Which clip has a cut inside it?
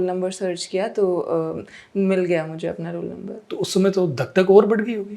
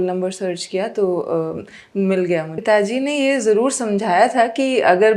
second; 1 cut; at 2.5 s

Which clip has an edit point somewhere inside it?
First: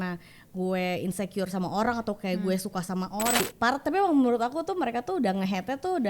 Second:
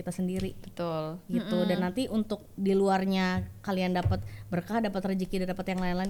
first; 1 cut; at 3.4 s

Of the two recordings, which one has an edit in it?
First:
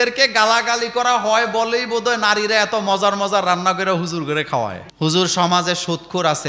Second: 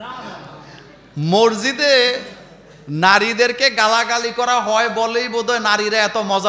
first; 1 cut; at 4.8 s

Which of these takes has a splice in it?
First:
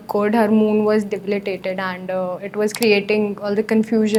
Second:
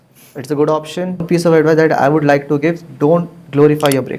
second; 1 cut; at 1.2 s

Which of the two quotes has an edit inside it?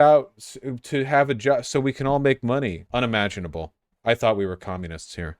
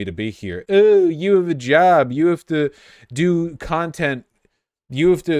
first; 1 cut; at 2.8 s

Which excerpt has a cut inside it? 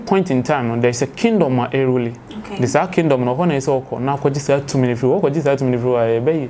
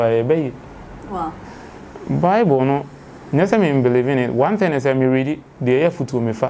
second; 1 cut; at 1.5 s

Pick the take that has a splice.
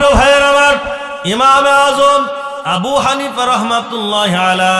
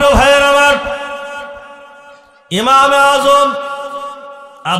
first; 2 cuts; at 1.4 s, 2.5 s

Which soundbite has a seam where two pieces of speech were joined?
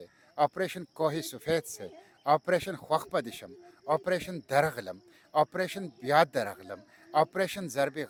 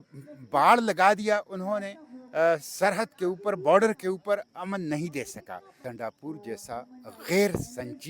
second; 1 cut; at 5.8 s

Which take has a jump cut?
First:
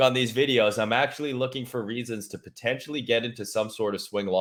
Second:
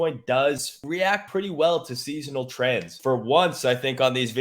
second; 2 cuts; at 1.2 s, 2.9 s

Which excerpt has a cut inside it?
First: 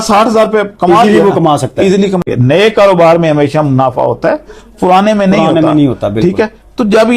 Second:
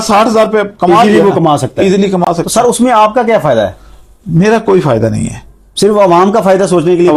first; 1 cut; at 2.2 s

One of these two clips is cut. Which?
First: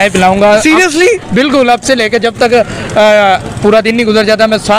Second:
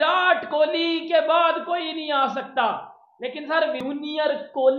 second; 1 cut; at 3.8 s

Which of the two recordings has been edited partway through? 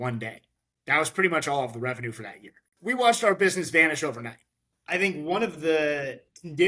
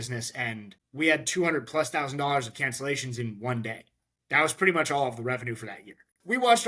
first; 1 cut; at 4.7 s

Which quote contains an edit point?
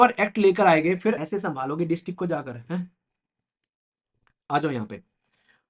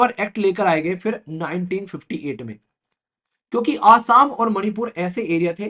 first; 1 cut; at 1.2 s

